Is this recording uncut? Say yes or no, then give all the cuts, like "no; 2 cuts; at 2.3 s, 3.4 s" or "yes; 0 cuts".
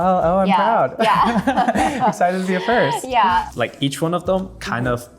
no; 1 cut; at 3.4 s